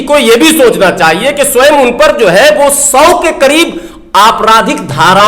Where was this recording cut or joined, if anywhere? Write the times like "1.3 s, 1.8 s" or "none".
none